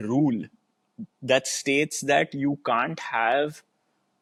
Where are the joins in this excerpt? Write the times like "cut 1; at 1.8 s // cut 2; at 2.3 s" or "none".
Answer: none